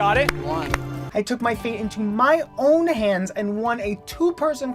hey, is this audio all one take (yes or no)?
no